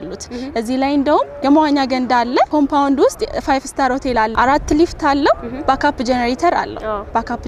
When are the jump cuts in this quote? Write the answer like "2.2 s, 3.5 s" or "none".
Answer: 1.4 s, 2.5 s, 4.3 s